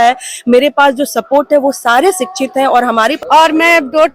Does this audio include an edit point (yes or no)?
yes